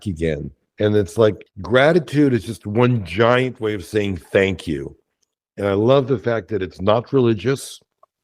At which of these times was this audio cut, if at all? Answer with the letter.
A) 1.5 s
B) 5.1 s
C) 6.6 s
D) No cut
A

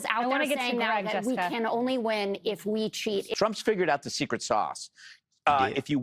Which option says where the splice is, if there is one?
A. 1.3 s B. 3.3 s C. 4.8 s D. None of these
B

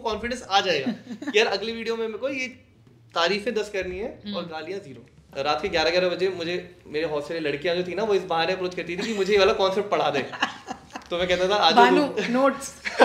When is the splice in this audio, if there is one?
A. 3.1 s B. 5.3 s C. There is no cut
B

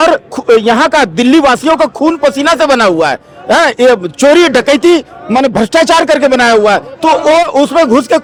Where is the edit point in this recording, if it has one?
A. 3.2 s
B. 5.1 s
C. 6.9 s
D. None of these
D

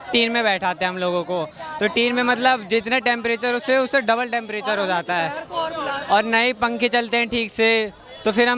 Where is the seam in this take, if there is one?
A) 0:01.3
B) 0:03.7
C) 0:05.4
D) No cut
D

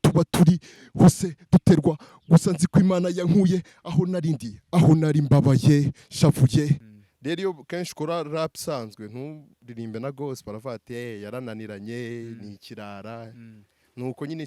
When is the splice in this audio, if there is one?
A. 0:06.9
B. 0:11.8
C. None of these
A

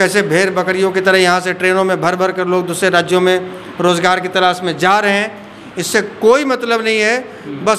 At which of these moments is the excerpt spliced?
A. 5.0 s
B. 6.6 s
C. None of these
C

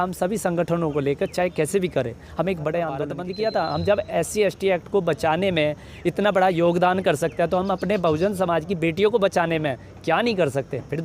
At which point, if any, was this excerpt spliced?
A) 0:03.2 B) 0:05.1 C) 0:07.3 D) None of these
A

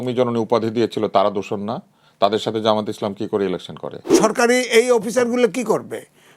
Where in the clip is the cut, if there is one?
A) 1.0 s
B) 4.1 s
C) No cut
B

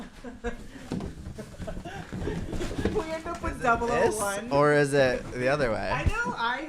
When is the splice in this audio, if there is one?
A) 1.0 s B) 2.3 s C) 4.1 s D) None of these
D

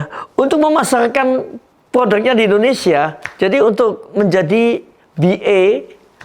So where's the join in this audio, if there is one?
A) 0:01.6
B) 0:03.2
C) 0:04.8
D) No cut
D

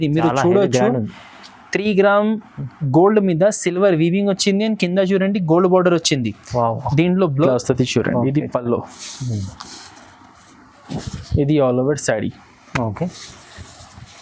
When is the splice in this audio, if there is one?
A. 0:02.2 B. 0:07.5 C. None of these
B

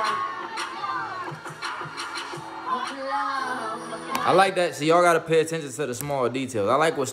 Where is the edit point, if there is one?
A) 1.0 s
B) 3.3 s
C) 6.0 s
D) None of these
A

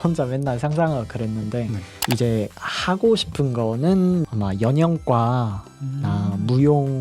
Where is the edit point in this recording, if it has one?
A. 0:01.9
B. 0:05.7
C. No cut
A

